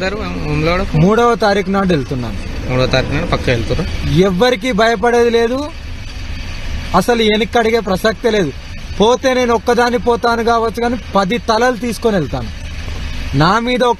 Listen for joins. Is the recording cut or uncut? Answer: uncut